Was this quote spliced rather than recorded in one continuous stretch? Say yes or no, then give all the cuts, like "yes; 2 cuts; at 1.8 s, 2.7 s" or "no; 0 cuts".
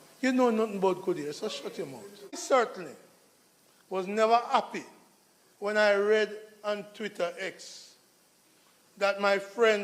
yes; 1 cut; at 2.4 s